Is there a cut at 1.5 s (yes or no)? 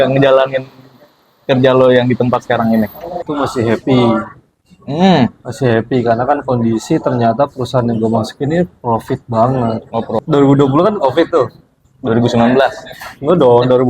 no